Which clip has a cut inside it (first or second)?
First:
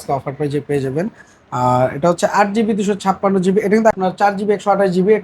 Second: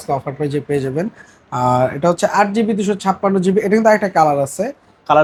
first